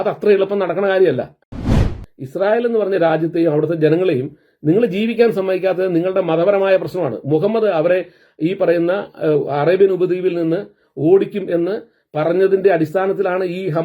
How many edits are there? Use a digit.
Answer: 1